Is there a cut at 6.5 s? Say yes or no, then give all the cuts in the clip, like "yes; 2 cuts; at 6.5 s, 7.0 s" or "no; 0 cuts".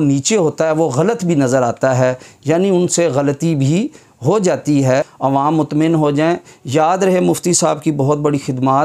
no; 1 cut; at 5.1 s